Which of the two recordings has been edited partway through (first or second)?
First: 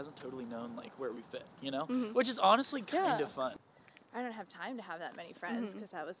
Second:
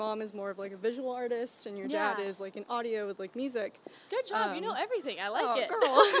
first